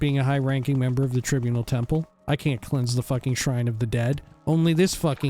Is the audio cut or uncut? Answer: cut